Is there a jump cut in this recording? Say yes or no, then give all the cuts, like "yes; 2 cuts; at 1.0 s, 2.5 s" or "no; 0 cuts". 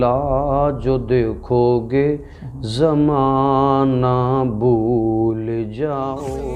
no; 0 cuts